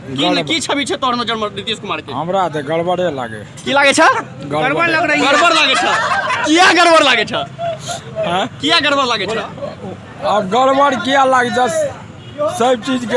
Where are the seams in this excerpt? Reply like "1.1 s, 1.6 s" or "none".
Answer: none